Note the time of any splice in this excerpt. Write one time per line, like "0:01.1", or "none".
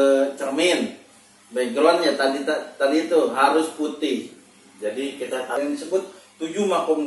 0:05.6